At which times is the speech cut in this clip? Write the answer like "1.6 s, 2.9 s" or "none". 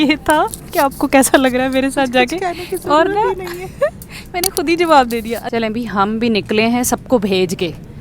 5.4 s